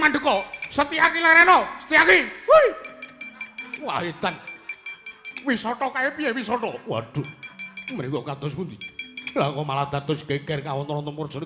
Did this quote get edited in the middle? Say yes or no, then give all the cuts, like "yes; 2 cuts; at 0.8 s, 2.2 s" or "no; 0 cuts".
no; 0 cuts